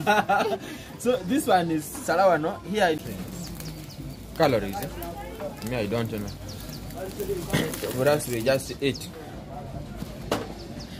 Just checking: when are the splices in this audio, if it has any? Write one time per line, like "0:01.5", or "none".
0:03.0